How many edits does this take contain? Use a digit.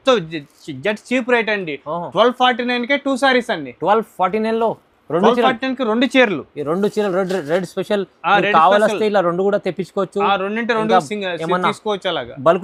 0